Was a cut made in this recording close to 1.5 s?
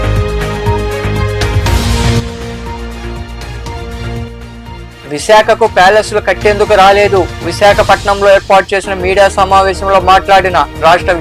yes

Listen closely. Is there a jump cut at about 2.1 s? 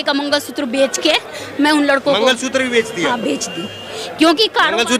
no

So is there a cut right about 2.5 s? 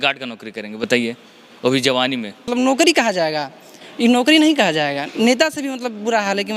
yes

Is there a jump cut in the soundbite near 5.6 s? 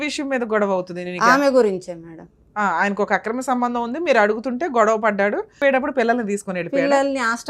yes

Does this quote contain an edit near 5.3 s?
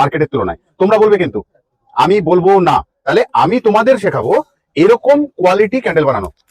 no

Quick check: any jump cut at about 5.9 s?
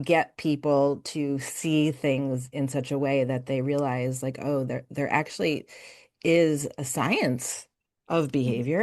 no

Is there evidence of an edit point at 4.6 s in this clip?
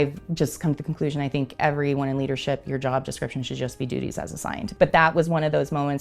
yes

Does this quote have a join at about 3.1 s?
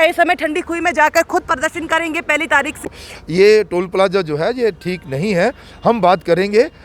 yes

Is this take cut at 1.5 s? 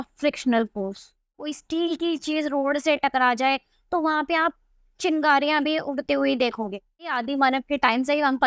yes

